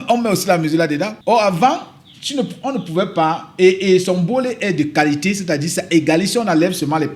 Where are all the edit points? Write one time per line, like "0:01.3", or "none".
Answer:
0:01.2